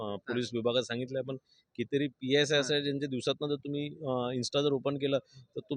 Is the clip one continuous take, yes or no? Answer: yes